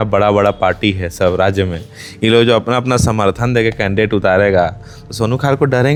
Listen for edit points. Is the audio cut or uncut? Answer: uncut